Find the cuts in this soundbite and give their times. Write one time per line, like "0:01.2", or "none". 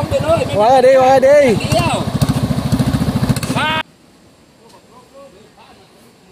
0:03.8